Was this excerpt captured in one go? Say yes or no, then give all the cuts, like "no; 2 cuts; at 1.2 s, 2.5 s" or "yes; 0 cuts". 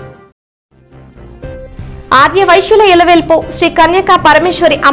yes; 0 cuts